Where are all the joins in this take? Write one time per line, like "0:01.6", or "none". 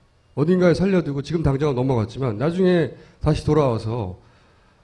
none